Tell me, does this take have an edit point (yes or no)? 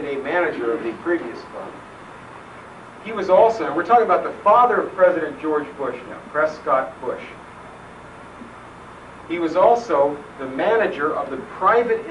no